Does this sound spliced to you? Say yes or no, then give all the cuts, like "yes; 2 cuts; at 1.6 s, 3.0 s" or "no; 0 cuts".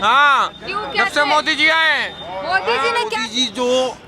yes; 1 cut; at 3.0 s